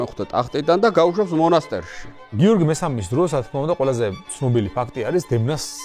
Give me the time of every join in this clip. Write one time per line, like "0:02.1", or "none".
0:02.3